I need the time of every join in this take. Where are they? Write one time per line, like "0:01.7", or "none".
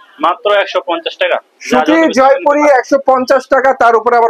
0:01.5